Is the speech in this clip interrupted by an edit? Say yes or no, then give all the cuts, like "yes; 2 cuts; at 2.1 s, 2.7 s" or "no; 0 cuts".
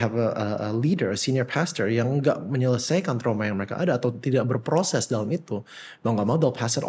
no; 0 cuts